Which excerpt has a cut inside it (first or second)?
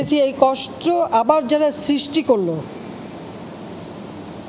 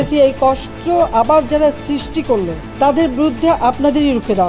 second